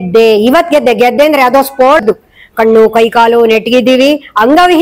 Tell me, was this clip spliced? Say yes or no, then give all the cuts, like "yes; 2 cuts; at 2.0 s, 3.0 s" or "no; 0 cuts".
yes; 1 cut; at 2.0 s